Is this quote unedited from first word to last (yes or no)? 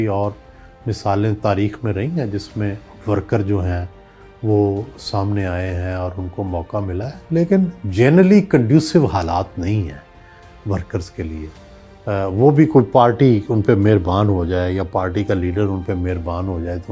yes